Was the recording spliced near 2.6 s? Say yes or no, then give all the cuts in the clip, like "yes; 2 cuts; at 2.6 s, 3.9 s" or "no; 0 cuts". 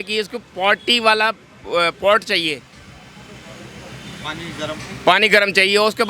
no; 0 cuts